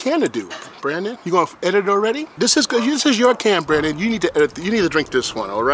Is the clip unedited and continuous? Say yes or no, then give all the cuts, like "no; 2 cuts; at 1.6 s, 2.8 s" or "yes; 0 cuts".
yes; 0 cuts